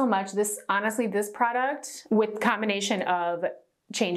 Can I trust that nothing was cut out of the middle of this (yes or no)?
no